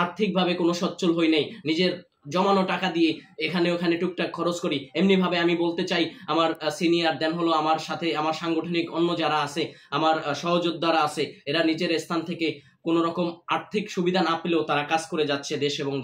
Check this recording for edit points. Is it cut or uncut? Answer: uncut